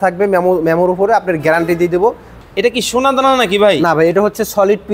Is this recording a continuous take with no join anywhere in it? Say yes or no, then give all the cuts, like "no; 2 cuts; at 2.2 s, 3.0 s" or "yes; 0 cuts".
no; 1 cut; at 2.3 s